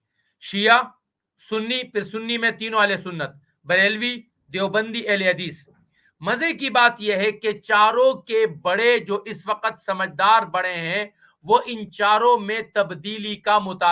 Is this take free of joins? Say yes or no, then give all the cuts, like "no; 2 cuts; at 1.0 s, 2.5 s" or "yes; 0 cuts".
yes; 0 cuts